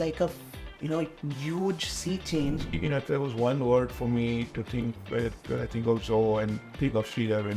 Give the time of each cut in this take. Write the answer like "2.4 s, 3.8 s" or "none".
2.7 s, 6.7 s

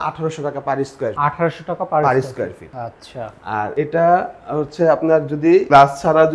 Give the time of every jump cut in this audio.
none

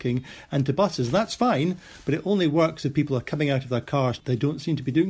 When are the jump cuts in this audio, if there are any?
4.2 s

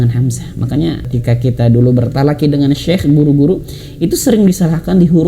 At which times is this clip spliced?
1.1 s

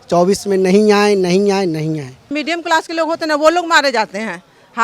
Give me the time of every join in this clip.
2.3 s

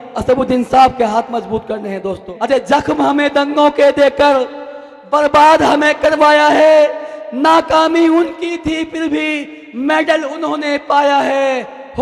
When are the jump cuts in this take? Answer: 2.2 s

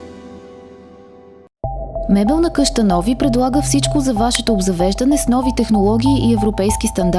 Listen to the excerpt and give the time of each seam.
1.3 s

